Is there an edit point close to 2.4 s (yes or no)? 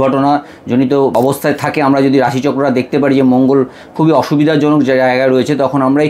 no